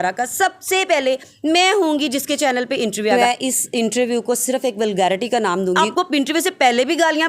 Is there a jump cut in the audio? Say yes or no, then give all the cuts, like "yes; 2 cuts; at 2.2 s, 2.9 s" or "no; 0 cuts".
yes; 2 cuts; at 3.1 s, 5.8 s